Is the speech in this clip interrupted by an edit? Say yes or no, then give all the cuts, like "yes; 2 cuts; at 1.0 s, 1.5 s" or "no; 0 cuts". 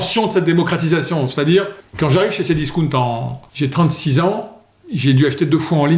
yes; 2 cuts; at 1.8 s, 3.4 s